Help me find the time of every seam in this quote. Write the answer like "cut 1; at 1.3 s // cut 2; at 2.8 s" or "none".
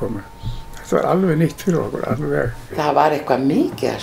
cut 1; at 2.6 s